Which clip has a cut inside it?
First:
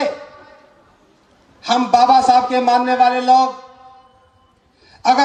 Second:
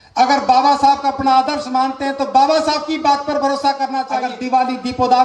second; 1 cut; at 4.2 s

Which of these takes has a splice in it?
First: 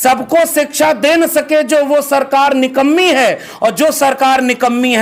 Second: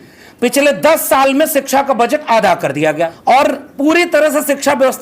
second; 1 cut; at 3.2 s

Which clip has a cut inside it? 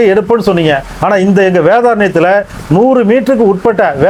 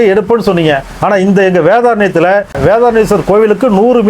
second; 1 cut; at 2.6 s

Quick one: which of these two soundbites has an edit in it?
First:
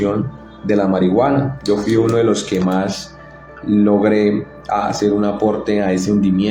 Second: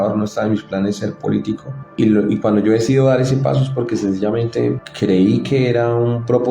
second; 2 cuts; at 1.8 s, 4.9 s

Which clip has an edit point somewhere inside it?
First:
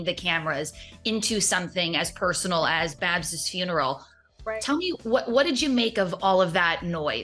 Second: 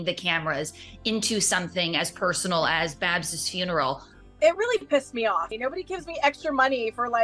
second; 2 cuts; at 4.2 s, 5.5 s

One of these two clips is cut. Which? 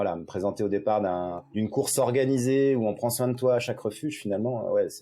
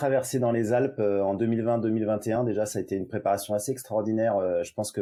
first; 1 cut; at 1.4 s

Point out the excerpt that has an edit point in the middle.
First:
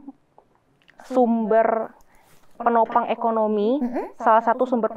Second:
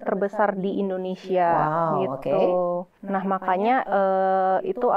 second; 1 cut; at 3.0 s

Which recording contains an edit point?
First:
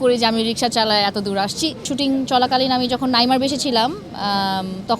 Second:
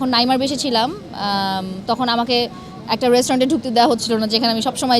first; 1 cut; at 1.9 s

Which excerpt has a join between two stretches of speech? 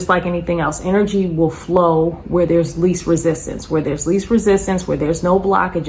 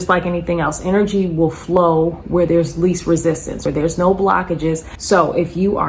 second; 2 cuts; at 3.6 s, 4.9 s

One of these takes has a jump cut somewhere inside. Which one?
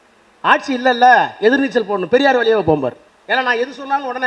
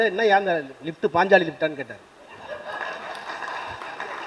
first; 1 cut; at 3.1 s

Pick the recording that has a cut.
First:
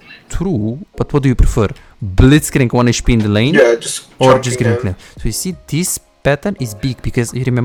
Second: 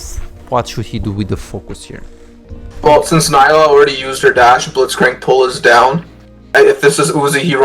second; 1 cut; at 6.4 s

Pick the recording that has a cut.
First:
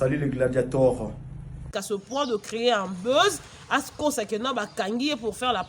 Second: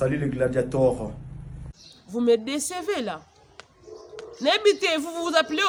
first; 2 cuts; at 1.7 s, 4.3 s

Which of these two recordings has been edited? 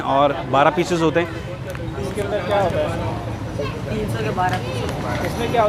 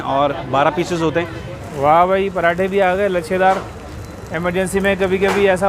second; 1 cut; at 1.6 s

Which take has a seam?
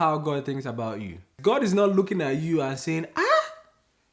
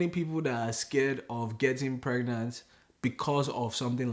first; 1 cut; at 1.3 s

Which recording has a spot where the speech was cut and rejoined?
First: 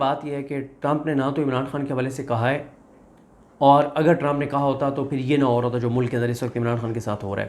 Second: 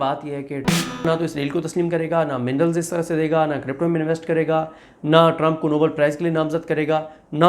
second; 1 cut; at 1.0 s

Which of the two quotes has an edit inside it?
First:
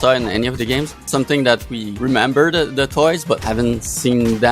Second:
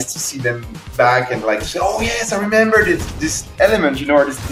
first; 3 cuts; at 1.0 s, 1.8 s, 3.4 s

